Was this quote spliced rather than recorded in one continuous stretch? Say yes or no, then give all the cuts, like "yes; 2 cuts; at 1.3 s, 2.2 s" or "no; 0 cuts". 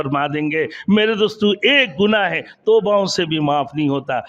no; 0 cuts